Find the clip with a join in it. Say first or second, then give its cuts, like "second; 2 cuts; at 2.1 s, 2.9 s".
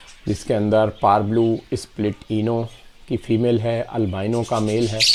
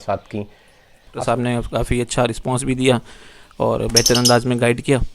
second; 1 cut; at 1.2 s